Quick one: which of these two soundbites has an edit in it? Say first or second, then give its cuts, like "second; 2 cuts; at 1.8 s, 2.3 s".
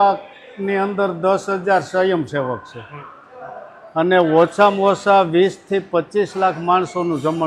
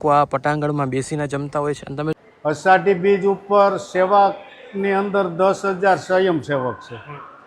second; 1 cut; at 2.1 s